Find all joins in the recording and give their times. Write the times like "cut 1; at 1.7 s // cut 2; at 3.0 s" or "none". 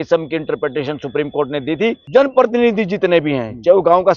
cut 1; at 2.0 s